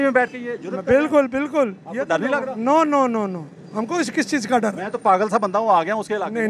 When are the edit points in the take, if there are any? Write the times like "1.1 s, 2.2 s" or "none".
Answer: none